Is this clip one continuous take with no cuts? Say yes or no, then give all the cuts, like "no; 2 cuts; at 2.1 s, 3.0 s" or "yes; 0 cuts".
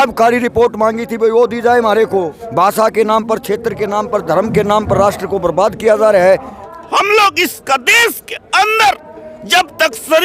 no; 2 cuts; at 2.4 s, 6.6 s